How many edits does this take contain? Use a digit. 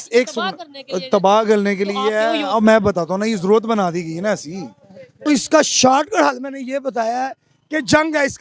1